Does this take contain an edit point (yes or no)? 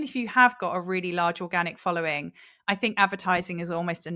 no